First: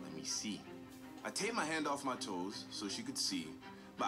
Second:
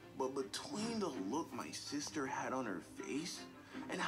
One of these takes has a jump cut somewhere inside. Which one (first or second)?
second